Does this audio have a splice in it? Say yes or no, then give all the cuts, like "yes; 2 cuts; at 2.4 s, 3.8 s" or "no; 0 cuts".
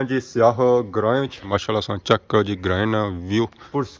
no; 0 cuts